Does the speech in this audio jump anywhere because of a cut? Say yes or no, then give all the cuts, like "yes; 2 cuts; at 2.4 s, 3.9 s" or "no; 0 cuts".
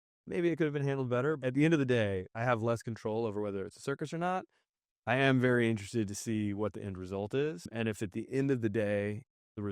yes; 3 cuts; at 1.4 s, 2.3 s, 7.7 s